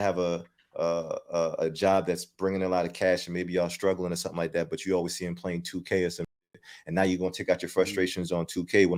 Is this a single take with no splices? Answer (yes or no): yes